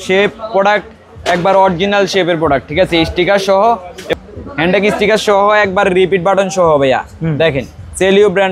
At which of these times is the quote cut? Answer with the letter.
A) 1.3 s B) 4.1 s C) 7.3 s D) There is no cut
B